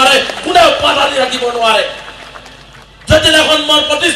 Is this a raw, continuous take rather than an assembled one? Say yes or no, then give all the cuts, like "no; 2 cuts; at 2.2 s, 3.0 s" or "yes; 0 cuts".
yes; 0 cuts